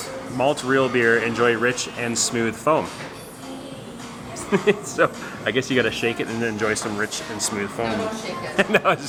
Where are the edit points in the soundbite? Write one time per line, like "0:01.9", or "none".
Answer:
none